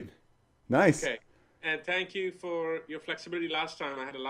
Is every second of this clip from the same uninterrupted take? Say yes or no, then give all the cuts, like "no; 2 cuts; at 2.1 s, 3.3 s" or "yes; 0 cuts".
yes; 0 cuts